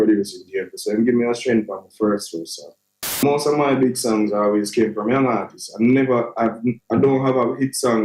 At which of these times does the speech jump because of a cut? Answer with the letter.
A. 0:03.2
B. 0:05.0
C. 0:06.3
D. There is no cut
A